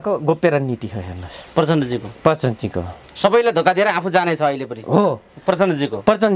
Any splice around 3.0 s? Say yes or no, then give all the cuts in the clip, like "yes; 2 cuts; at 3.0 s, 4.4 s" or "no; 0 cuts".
no; 0 cuts